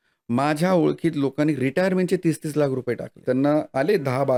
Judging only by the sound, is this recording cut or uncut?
uncut